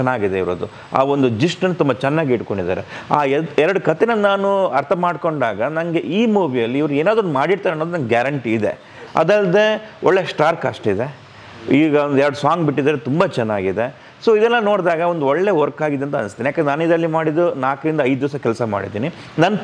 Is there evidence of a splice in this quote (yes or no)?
no